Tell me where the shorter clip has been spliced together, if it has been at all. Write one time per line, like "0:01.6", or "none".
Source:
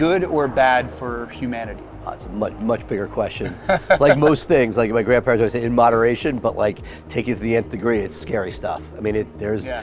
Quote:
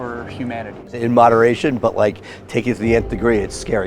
0:01.0